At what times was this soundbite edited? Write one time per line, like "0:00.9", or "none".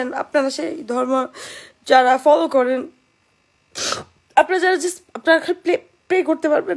none